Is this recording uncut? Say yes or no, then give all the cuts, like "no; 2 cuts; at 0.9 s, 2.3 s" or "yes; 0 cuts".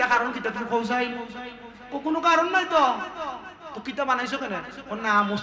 yes; 0 cuts